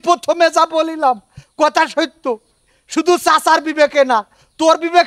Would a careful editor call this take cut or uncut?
uncut